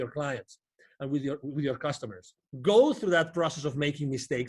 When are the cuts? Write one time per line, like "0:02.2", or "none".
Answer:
0:02.5